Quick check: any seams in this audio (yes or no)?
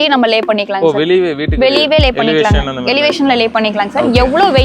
no